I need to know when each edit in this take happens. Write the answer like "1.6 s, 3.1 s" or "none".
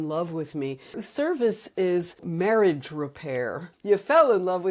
1.0 s, 2.2 s, 3.7 s